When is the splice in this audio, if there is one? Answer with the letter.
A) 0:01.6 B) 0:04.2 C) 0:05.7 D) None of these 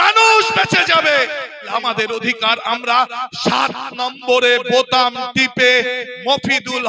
A